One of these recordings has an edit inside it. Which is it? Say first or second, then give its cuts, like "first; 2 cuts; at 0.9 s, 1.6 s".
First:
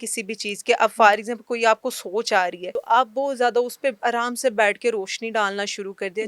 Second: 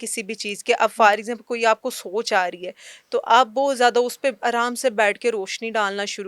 first; 1 cut; at 2.7 s